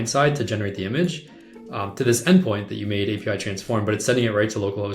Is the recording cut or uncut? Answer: uncut